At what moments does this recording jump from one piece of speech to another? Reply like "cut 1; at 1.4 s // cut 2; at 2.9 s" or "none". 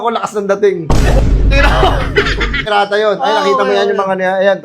cut 1; at 2.6 s